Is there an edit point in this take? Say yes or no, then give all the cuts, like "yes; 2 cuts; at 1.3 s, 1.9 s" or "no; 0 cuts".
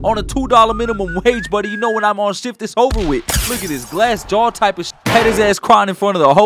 yes; 1 cut; at 5.0 s